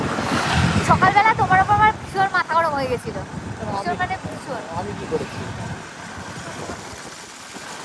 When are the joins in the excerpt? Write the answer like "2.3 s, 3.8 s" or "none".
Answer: none